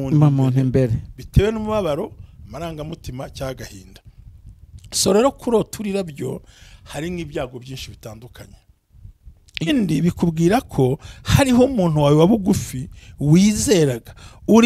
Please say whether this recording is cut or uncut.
cut